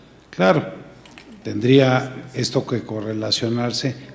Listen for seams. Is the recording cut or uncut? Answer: uncut